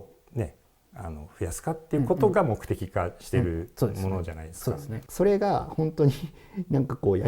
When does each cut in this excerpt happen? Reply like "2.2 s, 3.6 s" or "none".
5.0 s